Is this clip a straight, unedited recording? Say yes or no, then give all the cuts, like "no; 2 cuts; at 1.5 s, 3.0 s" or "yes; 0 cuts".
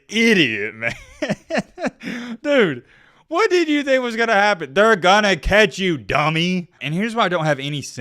no; 1 cut; at 6.7 s